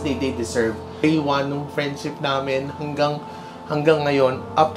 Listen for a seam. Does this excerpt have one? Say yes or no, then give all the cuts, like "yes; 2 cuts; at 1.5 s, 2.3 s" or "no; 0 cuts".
yes; 1 cut; at 1.0 s